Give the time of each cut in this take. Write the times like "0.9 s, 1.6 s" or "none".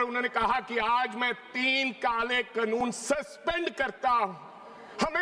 none